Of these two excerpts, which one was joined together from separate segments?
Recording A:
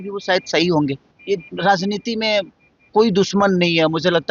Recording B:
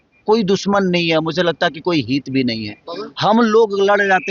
A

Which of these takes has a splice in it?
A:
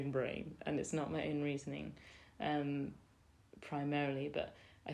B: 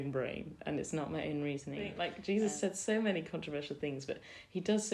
B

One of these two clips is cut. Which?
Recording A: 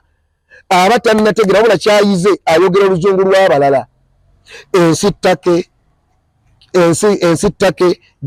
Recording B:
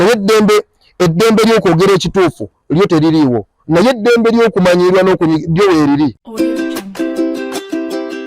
B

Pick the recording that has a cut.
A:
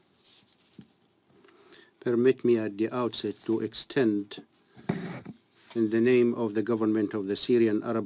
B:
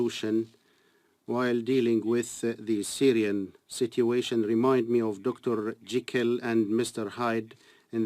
B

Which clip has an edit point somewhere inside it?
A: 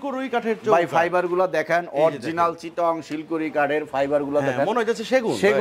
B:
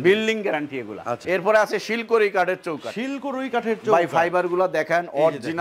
B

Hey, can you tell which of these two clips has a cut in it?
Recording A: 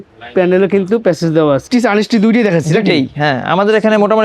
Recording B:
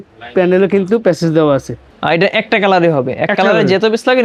A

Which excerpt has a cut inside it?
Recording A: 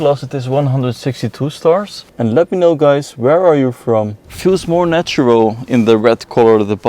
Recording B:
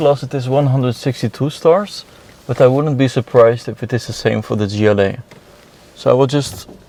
A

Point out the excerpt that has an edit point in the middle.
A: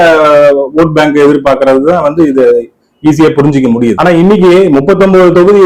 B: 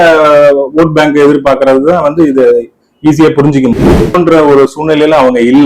B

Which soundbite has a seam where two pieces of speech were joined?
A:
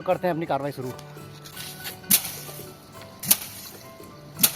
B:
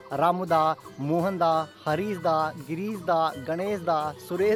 A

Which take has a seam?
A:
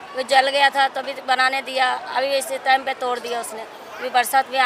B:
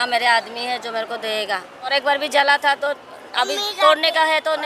B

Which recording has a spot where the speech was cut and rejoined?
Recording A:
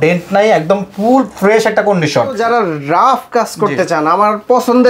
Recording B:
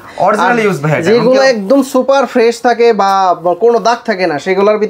A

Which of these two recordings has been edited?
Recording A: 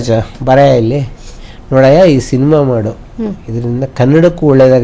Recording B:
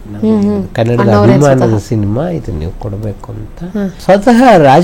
B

